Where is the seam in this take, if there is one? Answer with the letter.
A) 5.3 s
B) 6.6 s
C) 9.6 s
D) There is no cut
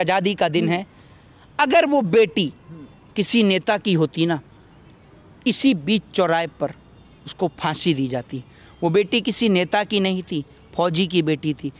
D